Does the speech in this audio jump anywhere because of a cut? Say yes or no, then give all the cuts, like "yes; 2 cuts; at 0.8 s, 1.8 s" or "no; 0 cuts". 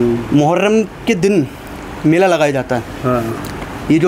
no; 0 cuts